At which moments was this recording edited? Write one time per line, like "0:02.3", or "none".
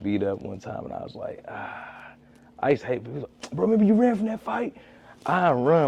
none